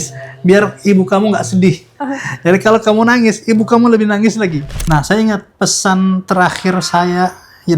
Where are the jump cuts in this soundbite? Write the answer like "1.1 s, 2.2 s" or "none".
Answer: 4.7 s